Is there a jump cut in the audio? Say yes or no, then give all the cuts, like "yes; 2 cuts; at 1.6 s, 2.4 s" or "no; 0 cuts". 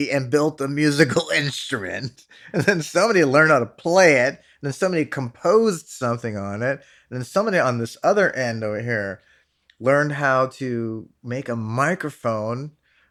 no; 0 cuts